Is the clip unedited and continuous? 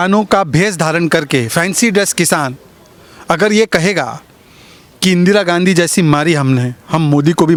yes; 0 cuts

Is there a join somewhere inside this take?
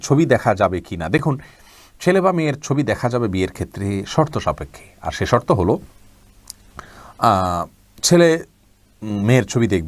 no; 0 cuts

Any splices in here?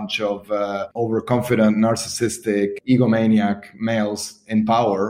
yes; 1 cut; at 2.8 s

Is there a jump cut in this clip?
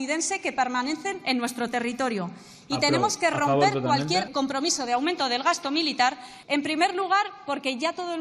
yes; 2 cuts; at 4.3 s, 6.3 s

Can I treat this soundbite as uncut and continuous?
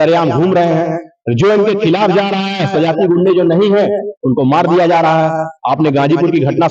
yes; 0 cuts

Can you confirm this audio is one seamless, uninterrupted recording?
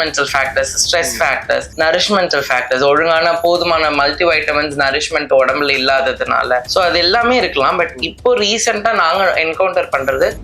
no; 2 cuts; at 1.7 s, 6.7 s

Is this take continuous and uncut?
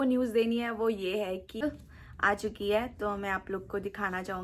no; 1 cut; at 1.6 s

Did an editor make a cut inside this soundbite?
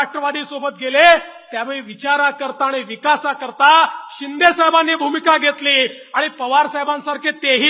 no; 0 cuts

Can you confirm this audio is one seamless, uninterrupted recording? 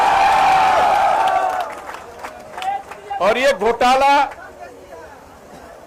yes; 0 cuts

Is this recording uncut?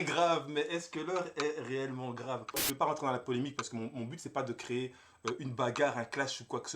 no; 1 cut; at 2.6 s

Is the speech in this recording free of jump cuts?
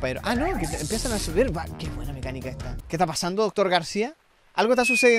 no; 1 cut; at 2.8 s

